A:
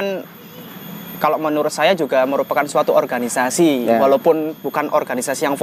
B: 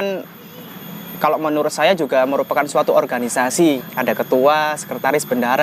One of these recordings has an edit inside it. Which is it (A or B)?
B